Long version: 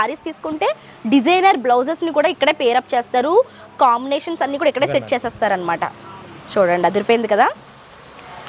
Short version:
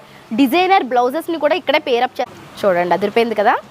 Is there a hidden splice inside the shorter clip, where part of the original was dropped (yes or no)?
yes